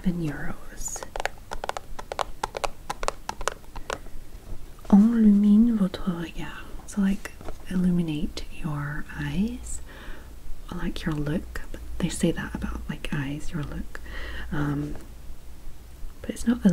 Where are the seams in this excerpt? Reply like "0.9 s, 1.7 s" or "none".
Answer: none